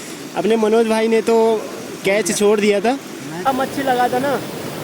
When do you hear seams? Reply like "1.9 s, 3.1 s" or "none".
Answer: 3.5 s